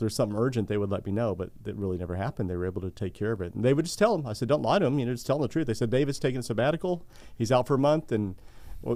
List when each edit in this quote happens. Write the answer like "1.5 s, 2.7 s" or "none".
none